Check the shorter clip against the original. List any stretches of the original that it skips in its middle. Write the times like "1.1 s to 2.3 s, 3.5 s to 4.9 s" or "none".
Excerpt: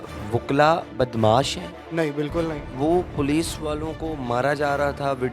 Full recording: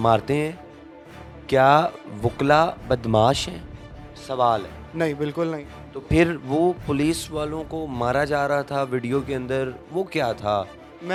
3.7 s to 4.8 s, 5.7 s to 6.4 s